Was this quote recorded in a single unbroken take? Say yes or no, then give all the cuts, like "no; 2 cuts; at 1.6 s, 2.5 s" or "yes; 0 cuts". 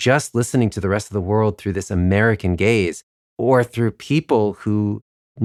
yes; 0 cuts